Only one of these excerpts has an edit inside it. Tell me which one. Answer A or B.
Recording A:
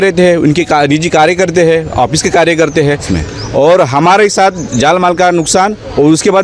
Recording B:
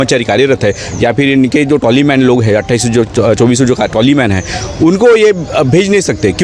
A